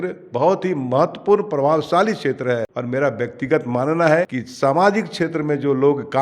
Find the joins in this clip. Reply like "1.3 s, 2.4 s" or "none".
2.7 s, 4.4 s